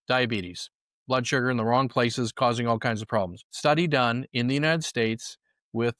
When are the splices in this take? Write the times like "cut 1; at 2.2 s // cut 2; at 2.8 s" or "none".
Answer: cut 1; at 3.4 s